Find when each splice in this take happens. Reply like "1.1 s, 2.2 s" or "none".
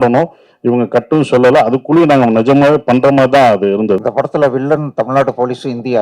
4.0 s